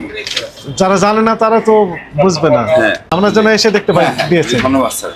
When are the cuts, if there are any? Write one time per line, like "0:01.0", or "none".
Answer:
0:03.1